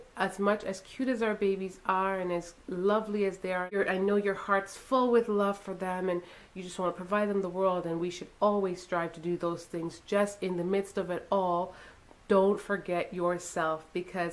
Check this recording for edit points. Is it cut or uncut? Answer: uncut